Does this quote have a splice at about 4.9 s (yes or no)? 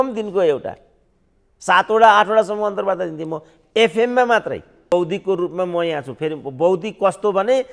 yes